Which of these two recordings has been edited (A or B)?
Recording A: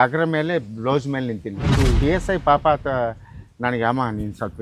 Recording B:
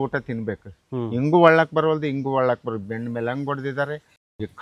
A